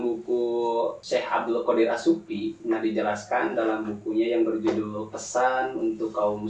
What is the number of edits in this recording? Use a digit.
1